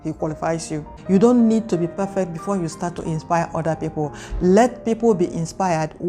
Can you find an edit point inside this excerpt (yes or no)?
yes